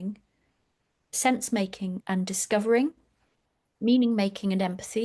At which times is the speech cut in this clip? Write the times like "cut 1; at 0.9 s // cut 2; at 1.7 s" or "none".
cut 1; at 1.2 s // cut 2; at 2.0 s